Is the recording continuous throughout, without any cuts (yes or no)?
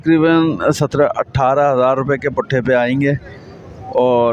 yes